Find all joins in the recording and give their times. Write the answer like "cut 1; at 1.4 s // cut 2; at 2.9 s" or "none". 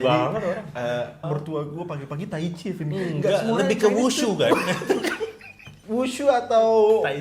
cut 1; at 1.2 s // cut 2; at 5.8 s